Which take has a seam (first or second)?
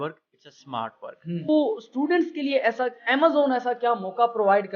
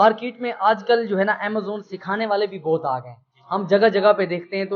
first